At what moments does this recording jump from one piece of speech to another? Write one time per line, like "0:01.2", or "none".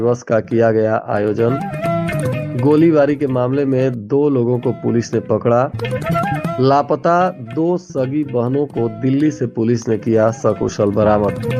none